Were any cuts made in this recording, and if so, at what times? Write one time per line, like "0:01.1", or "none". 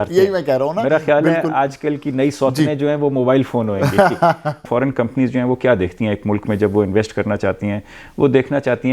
0:04.6

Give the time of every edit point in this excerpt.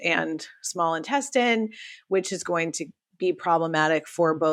none

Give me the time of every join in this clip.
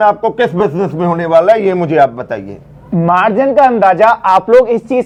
none

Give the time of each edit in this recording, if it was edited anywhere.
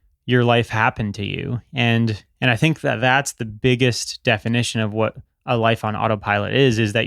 0:03.5

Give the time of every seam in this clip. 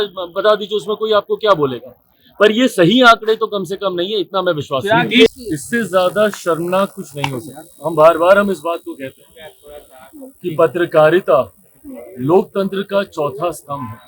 0:05.3

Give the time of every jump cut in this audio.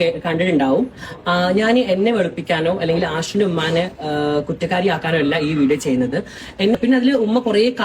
0:06.8

